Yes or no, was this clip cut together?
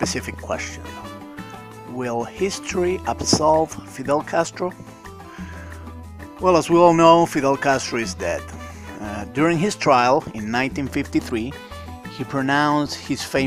yes